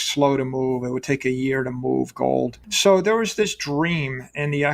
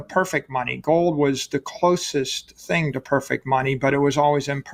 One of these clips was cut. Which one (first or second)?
first